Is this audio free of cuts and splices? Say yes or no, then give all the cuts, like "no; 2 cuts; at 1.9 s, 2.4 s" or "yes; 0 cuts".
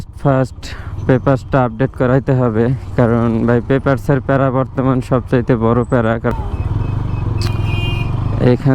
no; 1 cut; at 6.3 s